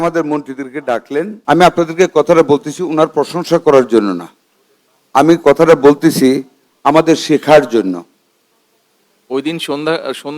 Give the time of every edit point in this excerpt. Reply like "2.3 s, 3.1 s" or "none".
1.4 s